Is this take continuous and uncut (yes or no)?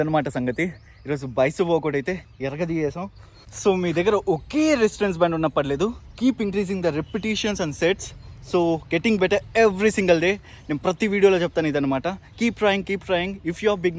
no